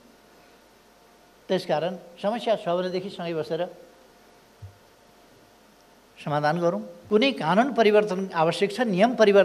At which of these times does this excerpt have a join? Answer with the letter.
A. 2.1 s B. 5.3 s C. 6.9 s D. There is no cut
C